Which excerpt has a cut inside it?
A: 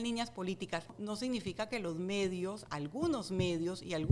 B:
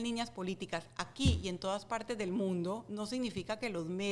A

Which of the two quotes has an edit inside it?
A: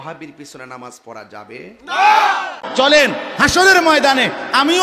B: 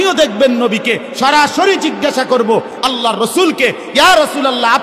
A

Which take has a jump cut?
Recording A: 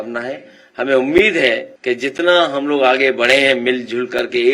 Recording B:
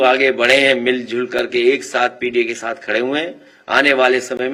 A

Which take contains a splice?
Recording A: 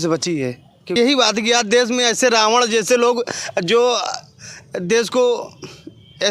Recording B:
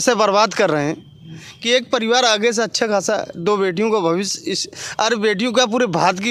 A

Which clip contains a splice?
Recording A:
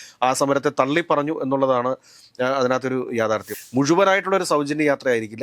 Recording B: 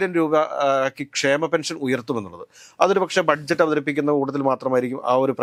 A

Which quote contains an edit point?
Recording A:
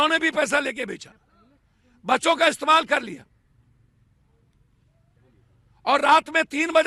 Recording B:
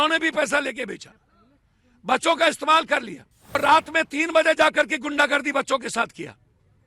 B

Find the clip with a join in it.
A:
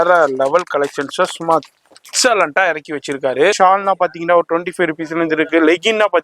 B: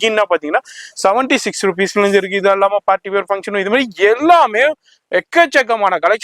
A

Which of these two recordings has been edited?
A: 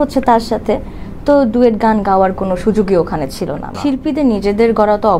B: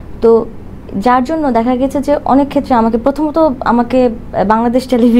A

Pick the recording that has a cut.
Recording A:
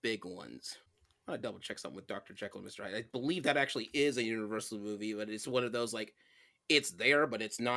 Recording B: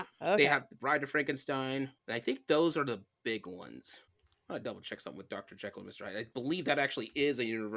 B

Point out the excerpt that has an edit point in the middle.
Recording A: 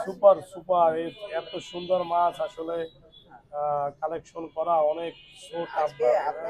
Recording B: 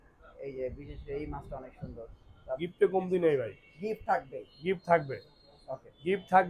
B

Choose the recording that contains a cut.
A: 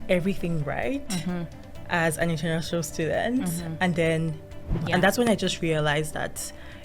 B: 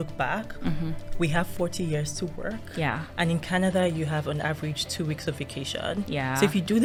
A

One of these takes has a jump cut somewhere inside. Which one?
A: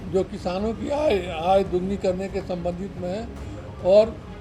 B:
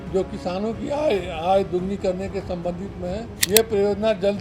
B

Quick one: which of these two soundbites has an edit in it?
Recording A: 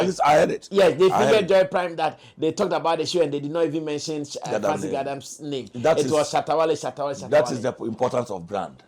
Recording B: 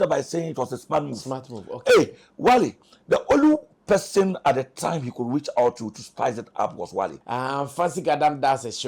B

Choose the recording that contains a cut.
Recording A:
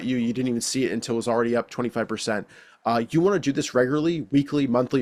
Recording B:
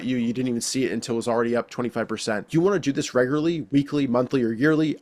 B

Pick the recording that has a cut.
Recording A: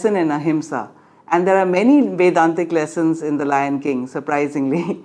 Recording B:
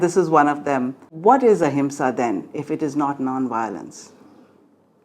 B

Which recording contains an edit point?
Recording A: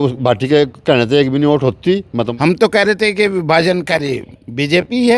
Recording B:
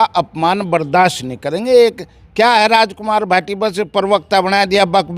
A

